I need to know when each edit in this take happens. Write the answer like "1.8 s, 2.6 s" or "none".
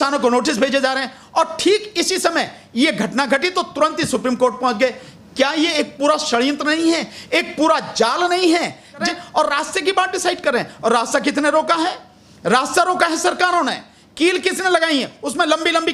9.1 s